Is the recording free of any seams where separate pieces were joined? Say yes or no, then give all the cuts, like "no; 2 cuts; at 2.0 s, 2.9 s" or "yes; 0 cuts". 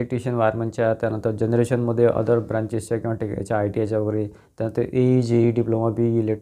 yes; 0 cuts